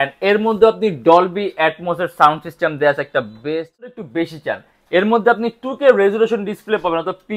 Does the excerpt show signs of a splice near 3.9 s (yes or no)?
yes